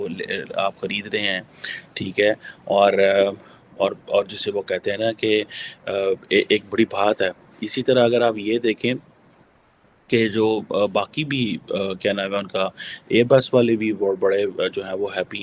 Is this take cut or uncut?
uncut